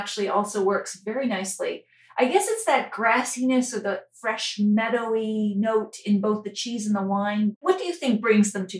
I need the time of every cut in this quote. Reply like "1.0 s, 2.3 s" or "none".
7.5 s